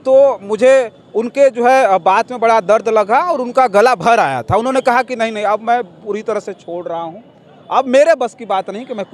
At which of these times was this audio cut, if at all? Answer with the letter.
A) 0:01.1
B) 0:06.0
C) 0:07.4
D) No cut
D